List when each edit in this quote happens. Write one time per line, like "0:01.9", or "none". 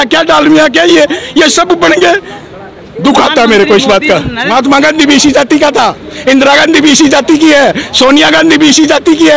0:04.4